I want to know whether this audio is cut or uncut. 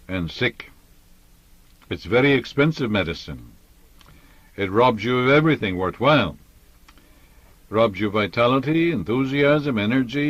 uncut